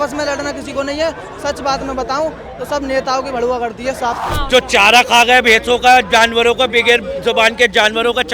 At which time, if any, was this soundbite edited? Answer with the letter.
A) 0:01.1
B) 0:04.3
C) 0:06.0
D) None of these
B